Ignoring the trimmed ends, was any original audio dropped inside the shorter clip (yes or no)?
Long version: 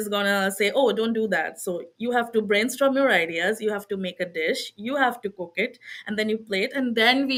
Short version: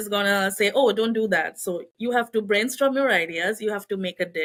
no